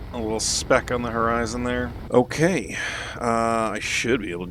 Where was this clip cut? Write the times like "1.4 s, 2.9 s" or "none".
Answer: 2.0 s

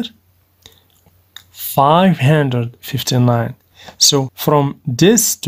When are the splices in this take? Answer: 0.9 s, 4.3 s

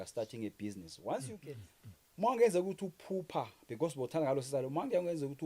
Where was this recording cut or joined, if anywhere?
1.4 s

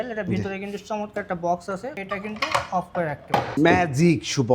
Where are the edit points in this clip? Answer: 1.9 s, 3.6 s

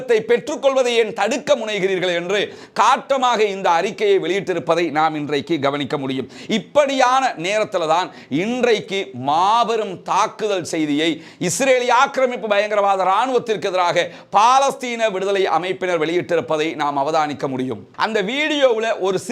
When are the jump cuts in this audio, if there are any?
none

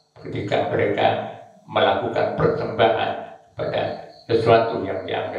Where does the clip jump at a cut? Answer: none

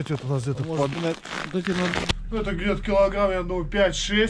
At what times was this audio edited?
2.1 s

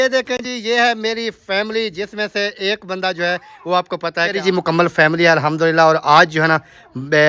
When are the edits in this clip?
4.4 s

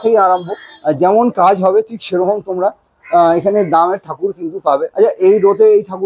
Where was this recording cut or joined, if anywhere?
none

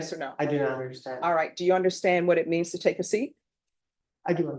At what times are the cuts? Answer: none

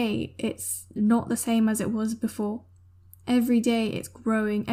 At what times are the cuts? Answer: none

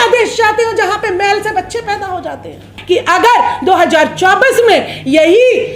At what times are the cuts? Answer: 2.7 s

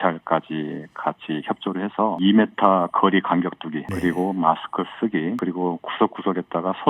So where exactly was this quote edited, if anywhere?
2.2 s, 3.9 s, 5.4 s

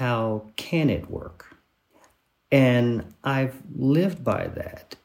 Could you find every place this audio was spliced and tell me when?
1.3 s

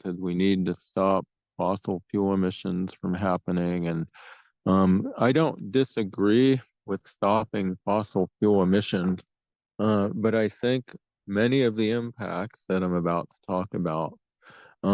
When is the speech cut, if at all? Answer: none

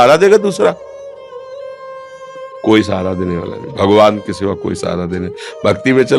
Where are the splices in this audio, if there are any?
none

